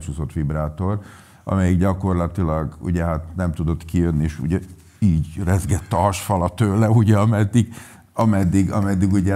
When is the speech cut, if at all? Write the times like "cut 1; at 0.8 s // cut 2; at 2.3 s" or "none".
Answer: none

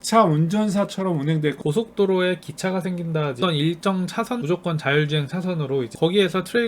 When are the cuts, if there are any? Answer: cut 1; at 1.6 s // cut 2; at 3.4 s // cut 3; at 4.4 s // cut 4; at 5.9 s

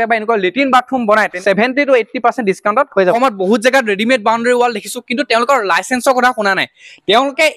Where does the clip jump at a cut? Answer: cut 1; at 1.3 s // cut 2; at 3.1 s

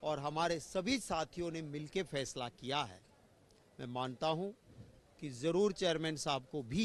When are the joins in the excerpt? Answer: none

